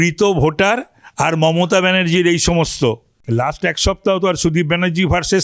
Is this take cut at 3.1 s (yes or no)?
yes